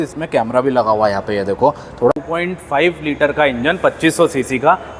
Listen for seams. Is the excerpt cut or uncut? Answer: cut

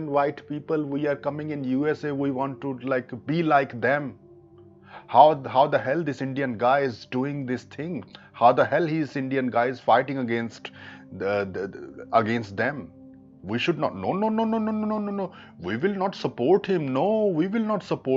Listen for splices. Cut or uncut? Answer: uncut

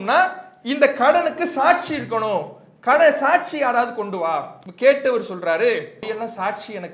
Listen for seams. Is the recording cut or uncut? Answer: cut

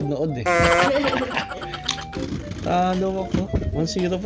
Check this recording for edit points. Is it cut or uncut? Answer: cut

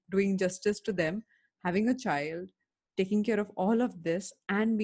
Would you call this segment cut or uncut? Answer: uncut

